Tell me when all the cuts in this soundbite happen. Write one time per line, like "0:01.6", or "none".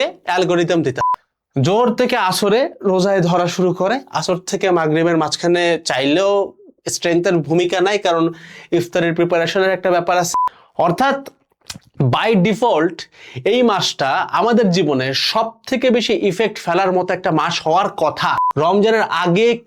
0:01.0
0:10.3
0:18.4